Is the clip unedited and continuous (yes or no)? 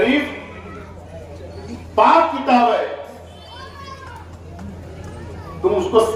yes